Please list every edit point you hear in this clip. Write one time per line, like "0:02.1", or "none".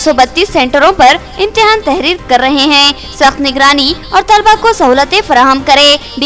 none